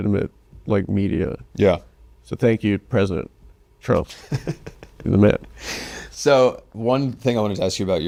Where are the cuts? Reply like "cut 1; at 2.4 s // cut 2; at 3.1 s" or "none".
none